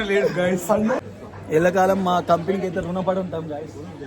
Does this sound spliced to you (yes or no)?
yes